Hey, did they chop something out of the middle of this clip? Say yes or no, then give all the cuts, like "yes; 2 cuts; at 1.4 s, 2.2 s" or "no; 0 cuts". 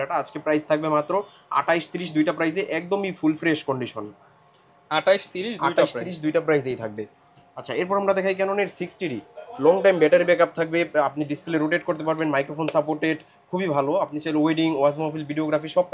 no; 0 cuts